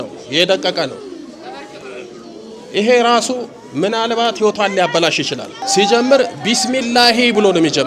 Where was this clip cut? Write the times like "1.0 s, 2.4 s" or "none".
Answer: 5.6 s